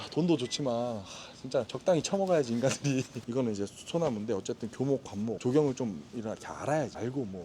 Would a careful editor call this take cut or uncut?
cut